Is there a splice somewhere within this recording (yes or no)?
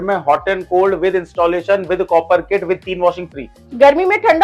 no